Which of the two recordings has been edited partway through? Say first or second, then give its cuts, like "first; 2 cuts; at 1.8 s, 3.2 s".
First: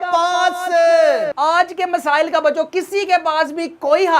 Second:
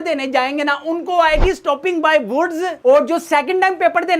first; 1 cut; at 1.3 s